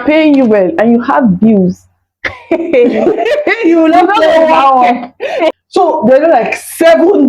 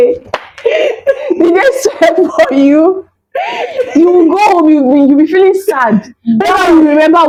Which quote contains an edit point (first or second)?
first